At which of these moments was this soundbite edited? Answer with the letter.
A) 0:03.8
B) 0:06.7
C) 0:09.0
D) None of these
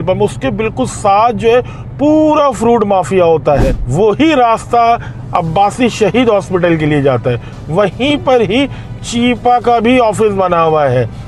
A